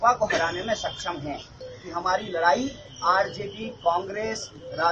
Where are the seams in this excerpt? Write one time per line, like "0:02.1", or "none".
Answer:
0:01.7